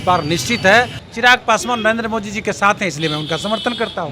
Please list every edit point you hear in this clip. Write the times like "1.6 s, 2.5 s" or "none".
1.0 s